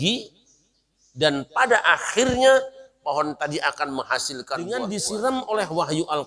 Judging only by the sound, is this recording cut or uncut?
cut